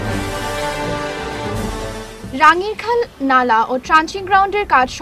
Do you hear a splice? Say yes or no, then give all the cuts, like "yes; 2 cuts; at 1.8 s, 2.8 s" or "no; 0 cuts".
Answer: no; 0 cuts